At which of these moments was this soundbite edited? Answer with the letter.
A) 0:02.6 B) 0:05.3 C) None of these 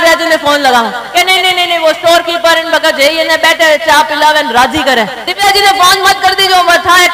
B